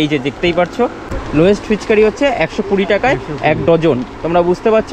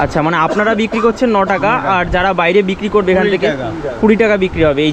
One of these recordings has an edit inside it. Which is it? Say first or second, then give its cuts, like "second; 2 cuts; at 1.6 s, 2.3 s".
first; 1 cut; at 1.1 s